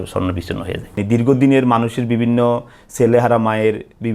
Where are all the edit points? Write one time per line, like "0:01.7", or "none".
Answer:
0:01.0